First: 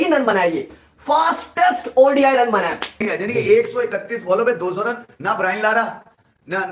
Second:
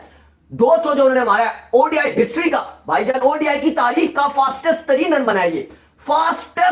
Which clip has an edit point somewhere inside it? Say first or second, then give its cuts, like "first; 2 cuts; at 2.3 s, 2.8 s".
first; 1 cut; at 2.9 s